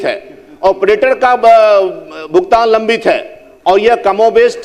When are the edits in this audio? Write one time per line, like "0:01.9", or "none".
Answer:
none